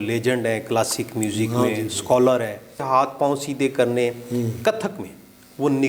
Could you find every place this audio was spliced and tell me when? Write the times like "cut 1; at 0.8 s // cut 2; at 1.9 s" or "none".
cut 1; at 2.8 s